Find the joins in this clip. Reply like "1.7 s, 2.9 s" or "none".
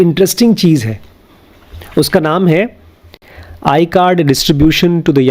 none